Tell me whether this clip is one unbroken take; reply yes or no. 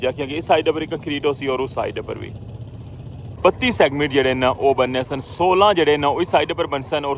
no